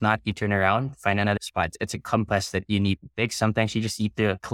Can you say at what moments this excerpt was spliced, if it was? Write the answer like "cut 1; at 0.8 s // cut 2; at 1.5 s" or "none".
cut 1; at 1.6 s